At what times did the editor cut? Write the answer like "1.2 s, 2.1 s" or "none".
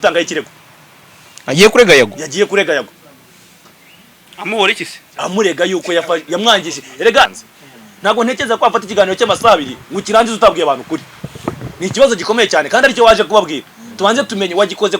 7.3 s